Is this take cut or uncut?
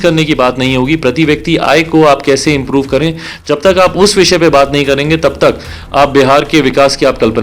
uncut